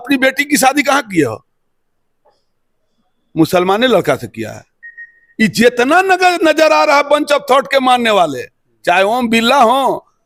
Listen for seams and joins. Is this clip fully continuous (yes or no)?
yes